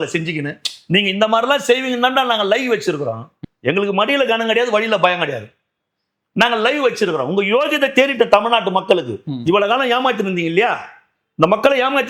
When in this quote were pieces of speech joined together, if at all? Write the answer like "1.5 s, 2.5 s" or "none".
none